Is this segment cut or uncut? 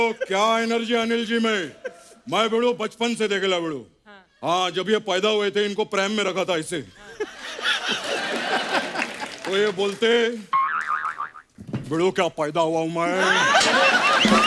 uncut